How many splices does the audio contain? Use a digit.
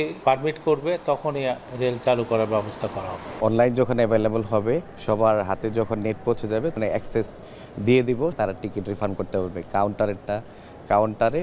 5